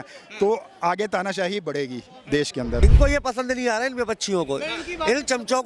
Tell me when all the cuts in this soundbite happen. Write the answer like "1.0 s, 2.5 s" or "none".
2.8 s